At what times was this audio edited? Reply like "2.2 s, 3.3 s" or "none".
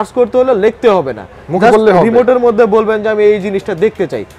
none